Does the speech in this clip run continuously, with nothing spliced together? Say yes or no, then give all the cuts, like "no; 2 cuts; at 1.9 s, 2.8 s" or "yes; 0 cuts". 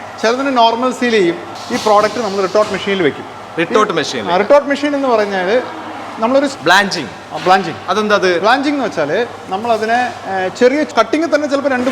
no; 3 cuts; at 1.5 s, 6.5 s, 10.9 s